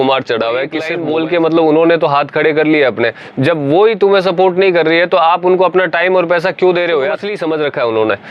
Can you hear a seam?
yes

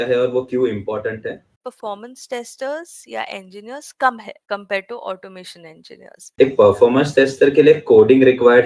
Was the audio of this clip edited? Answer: yes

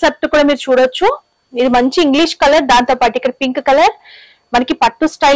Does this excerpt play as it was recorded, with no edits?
yes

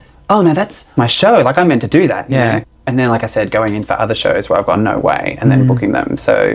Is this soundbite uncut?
yes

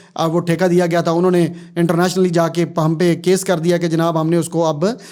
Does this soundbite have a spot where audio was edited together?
no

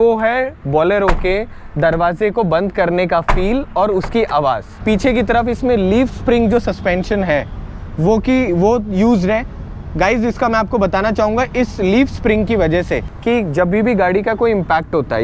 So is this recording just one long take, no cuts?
no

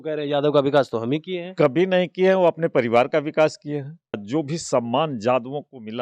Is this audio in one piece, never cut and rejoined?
no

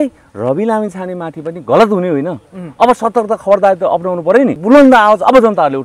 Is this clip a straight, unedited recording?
no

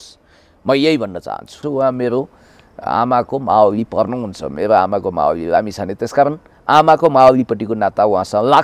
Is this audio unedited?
no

